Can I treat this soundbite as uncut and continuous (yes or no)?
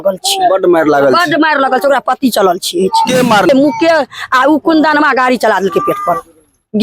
no